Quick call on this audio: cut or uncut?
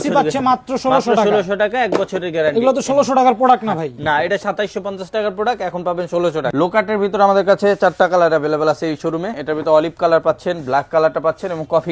cut